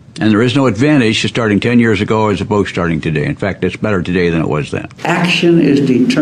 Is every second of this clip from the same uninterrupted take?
no; 1 cut; at 4.9 s

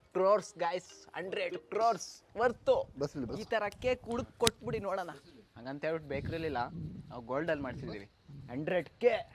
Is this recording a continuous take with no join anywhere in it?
yes; 0 cuts

